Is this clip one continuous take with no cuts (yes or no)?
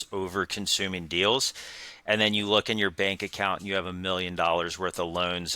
no